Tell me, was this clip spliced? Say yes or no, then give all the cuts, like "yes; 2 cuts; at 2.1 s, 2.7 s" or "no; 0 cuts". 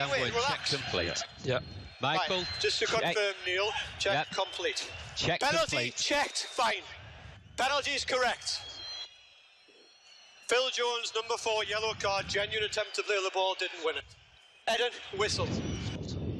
yes; 1 cut; at 9.8 s